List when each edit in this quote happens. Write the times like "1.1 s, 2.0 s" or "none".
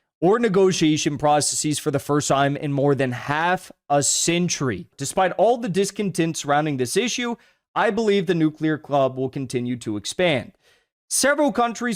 5.0 s